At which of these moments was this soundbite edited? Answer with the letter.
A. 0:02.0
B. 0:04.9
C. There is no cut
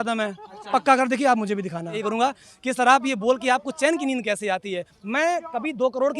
A